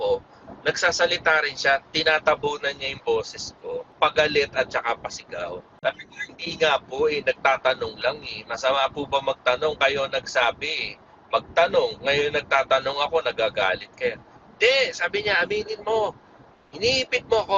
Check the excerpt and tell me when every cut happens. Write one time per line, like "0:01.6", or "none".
0:03.8
0:05.8